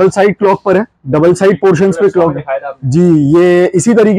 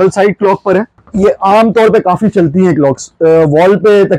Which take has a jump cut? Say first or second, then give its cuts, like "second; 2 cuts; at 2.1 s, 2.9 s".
second; 1 cut; at 1.0 s